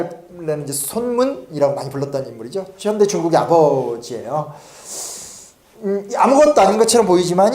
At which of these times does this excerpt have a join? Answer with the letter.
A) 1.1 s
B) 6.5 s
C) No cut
A